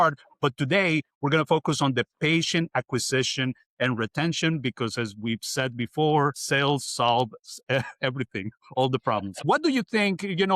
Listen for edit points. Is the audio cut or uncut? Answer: cut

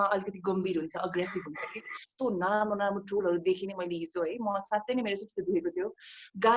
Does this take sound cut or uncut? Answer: cut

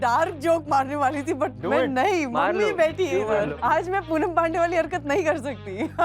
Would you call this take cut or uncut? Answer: cut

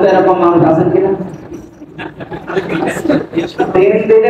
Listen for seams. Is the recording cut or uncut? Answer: uncut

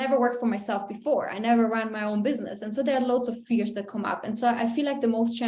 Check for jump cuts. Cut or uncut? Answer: uncut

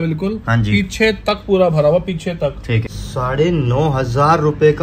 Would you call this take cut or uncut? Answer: cut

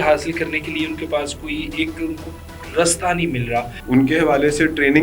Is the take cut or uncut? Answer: cut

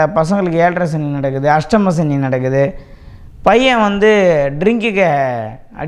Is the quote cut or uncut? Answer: uncut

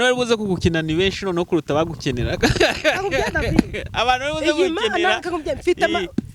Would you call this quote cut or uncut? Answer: uncut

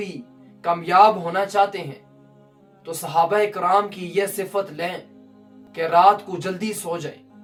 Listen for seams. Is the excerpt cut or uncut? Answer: uncut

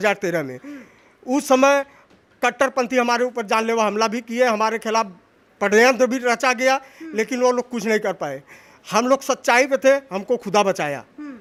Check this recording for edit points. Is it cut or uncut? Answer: uncut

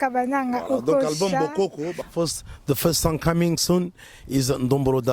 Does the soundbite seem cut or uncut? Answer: cut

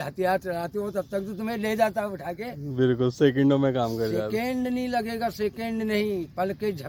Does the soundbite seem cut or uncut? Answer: uncut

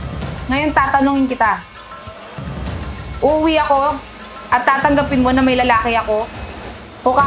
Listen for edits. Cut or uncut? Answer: uncut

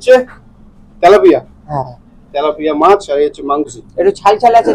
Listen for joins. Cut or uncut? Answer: cut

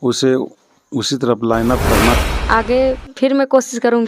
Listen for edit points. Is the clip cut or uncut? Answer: cut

